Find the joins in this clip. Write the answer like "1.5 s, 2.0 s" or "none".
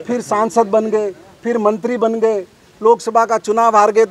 none